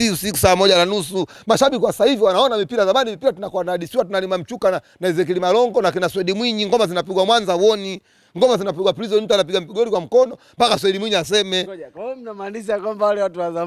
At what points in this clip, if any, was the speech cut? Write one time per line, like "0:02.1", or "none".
none